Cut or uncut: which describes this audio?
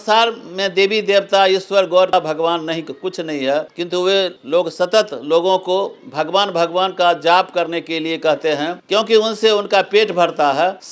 uncut